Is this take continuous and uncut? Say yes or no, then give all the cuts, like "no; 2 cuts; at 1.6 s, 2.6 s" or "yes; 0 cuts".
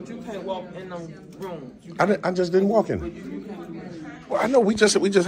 yes; 0 cuts